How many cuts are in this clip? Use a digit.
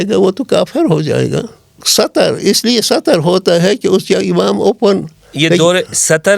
1